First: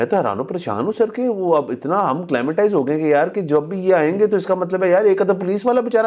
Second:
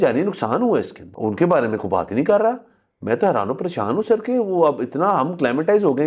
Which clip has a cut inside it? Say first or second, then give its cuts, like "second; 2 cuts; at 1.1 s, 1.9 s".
second; 1 cut; at 1.0 s